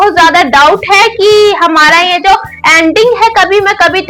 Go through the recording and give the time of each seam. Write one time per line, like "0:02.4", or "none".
none